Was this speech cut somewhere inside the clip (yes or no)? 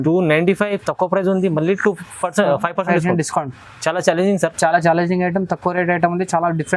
no